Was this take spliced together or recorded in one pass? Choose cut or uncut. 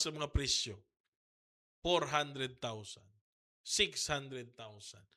uncut